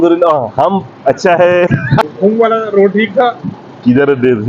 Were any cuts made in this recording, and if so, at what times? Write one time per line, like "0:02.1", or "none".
0:02.0